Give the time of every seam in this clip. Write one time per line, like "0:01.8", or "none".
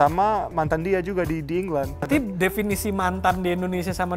0:02.1